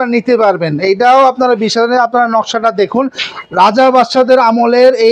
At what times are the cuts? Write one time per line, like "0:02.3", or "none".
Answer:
none